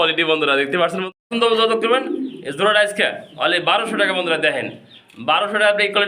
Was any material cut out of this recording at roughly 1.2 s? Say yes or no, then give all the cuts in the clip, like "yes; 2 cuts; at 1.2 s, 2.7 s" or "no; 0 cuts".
yes; 1 cut; at 1.2 s